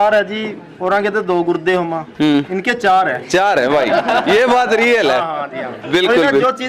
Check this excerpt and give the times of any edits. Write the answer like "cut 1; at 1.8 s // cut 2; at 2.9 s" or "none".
none